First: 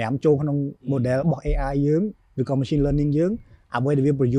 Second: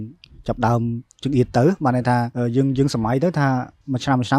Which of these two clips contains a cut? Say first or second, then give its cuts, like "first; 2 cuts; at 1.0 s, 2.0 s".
second; 1 cut; at 2.3 s